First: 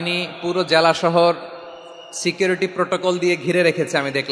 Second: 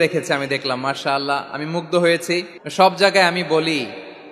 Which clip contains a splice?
second; 1 cut; at 2.6 s

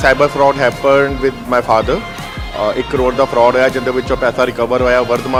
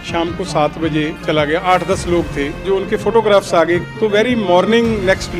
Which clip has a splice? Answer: second; 3 cuts; at 1.2 s, 2.6 s, 3.9 s

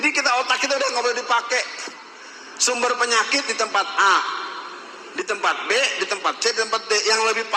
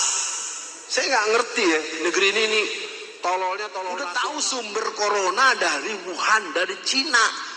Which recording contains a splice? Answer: second; 1 cut; at 4.0 s

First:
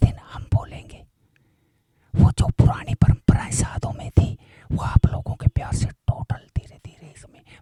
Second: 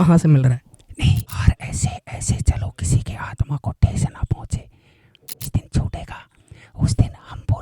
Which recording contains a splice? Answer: second; 2 cuts; at 1.3 s, 5.5 s

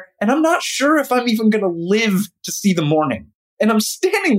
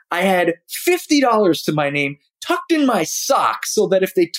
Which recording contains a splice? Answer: first; 1 cut; at 3.3 s

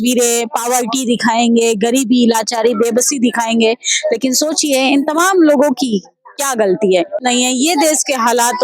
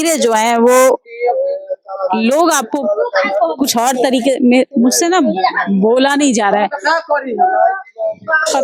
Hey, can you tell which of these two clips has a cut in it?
first; 1 cut; at 7.3 s

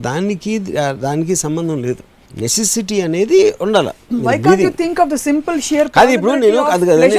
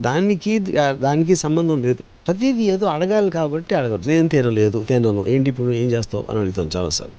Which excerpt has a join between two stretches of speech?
second; 1 cut; at 2.2 s

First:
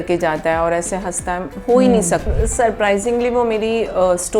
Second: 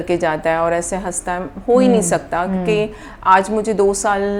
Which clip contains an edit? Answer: first; 1 cut; at 2.3 s

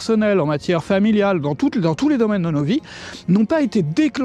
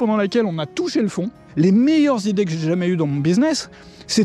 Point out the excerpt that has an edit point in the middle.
second; 1 cut; at 1.4 s

